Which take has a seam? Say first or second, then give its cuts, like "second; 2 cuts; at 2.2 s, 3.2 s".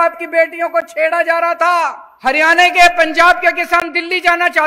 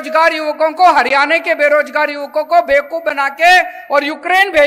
first; 1 cut; at 2.0 s